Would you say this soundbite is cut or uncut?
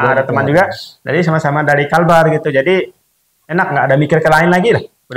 uncut